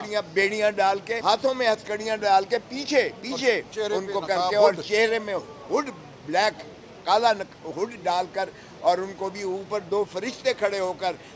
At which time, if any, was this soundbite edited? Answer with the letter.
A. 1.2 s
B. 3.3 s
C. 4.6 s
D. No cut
A